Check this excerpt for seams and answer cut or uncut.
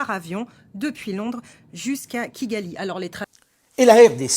cut